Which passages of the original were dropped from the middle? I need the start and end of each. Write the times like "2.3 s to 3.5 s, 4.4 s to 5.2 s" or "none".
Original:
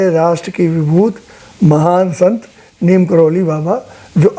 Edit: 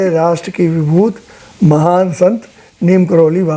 none